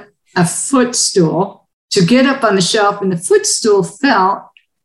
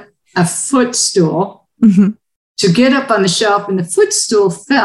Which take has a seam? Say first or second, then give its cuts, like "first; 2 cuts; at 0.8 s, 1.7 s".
first; 1 cut; at 1.6 s